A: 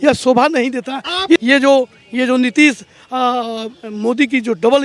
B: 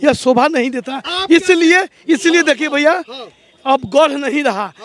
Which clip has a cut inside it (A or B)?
A